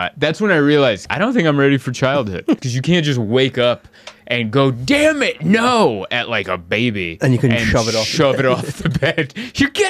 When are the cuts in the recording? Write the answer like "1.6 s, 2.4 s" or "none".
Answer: 1.1 s, 2.6 s